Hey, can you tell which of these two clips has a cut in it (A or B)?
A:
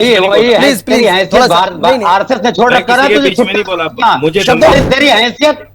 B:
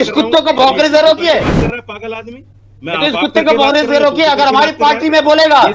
A